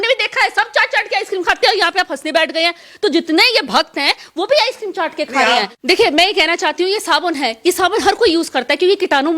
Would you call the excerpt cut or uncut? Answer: cut